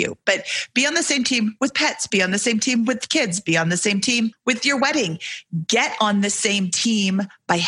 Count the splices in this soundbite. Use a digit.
1